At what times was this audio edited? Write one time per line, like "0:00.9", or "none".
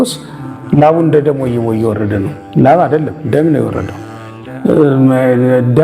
none